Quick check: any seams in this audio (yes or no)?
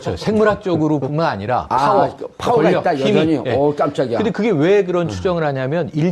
no